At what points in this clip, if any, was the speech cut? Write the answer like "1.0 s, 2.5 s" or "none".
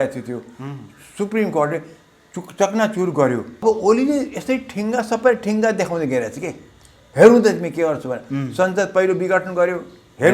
3.6 s